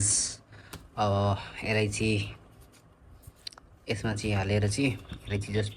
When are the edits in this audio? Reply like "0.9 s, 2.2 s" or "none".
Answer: none